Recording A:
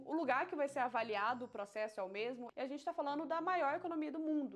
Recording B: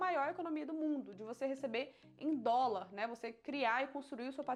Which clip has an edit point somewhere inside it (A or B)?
A